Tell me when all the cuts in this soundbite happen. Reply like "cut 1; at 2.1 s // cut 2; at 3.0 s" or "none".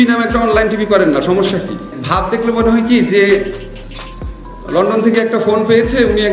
cut 1; at 2.0 s